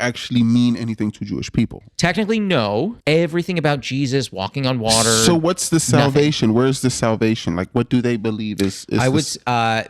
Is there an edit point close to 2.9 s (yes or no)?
yes